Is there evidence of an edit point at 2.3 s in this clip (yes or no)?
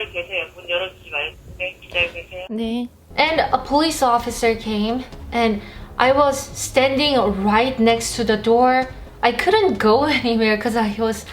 no